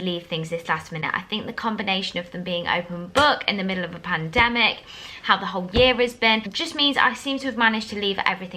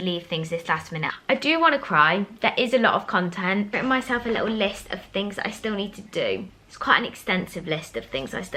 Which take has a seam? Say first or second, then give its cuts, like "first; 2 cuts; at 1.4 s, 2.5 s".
second; 2 cuts; at 1.1 s, 3.7 s